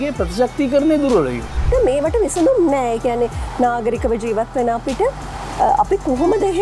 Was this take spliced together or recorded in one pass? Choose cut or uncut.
cut